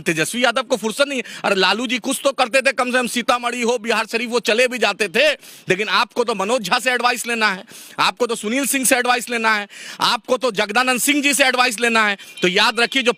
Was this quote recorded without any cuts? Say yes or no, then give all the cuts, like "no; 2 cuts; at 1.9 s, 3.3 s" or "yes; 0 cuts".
yes; 0 cuts